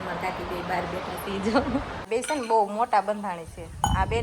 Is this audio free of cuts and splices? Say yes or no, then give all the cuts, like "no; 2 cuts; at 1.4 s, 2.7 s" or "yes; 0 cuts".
no; 1 cut; at 2.1 s